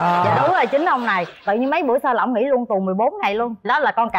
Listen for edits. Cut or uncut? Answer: uncut